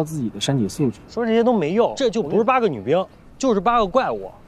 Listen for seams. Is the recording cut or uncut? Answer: cut